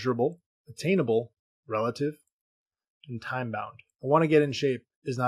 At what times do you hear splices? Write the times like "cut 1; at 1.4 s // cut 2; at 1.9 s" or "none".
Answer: cut 1; at 3.9 s